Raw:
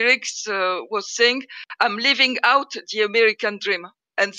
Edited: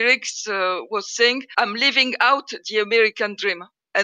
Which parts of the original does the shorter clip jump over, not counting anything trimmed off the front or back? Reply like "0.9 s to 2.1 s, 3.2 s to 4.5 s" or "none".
1.5 s to 1.7 s